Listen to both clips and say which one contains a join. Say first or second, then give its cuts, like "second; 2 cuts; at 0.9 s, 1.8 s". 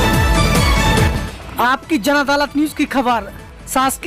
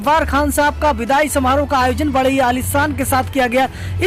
first; 1 cut; at 1.1 s